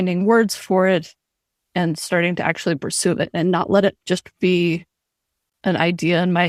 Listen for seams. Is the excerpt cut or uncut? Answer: uncut